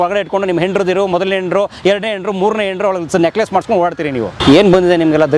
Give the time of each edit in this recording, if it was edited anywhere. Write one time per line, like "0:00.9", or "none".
0:04.4